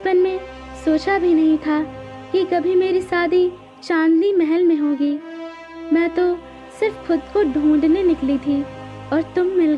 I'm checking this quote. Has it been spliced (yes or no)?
no